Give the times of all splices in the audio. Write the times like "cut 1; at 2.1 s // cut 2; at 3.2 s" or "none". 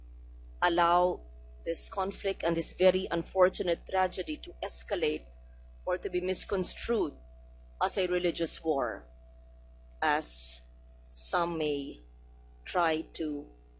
none